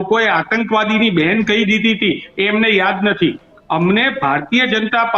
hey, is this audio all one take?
yes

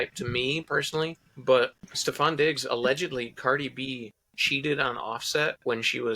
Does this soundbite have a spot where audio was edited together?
yes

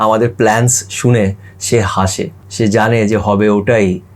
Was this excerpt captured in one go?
no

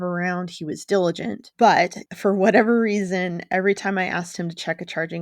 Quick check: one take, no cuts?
no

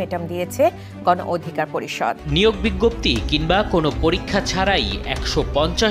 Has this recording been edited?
yes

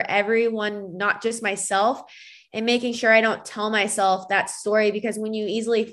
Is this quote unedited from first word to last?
yes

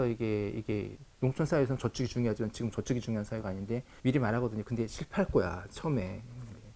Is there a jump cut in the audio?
yes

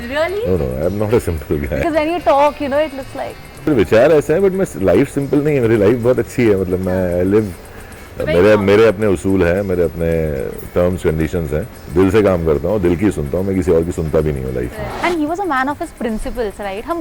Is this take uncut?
no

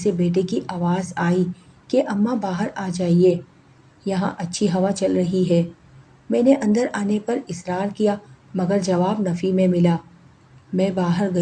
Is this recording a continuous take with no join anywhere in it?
yes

